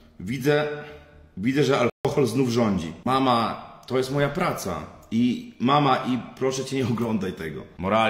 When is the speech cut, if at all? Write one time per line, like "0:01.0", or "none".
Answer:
none